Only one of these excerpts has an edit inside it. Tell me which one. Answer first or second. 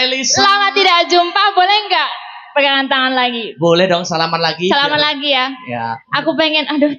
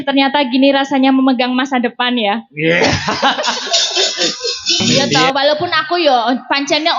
second